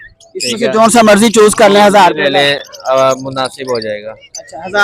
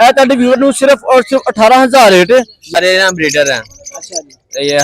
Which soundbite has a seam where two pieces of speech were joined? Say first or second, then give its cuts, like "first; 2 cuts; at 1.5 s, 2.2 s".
second; 1 cut; at 2.7 s